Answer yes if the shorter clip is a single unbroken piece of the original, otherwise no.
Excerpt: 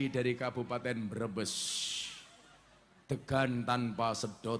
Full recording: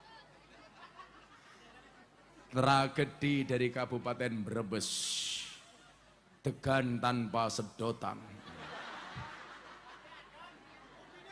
yes